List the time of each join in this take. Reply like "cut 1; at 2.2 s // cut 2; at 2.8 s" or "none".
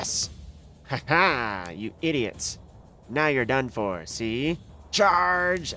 cut 1; at 4.7 s